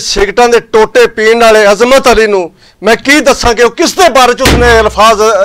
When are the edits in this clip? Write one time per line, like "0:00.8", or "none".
none